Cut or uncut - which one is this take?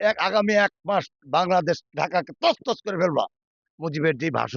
cut